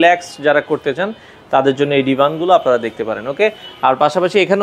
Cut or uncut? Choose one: uncut